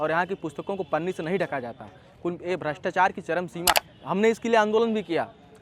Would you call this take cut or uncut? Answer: cut